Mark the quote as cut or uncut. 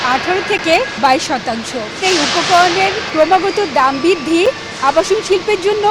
cut